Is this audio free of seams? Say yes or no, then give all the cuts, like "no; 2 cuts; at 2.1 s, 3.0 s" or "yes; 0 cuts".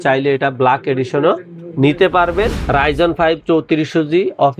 no; 1 cut; at 2.6 s